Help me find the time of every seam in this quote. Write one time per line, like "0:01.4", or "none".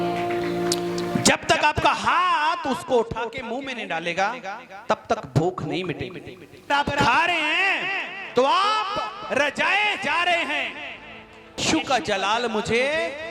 0:06.7
0:11.6